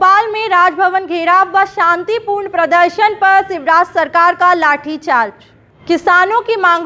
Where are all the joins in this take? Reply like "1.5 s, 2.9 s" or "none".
none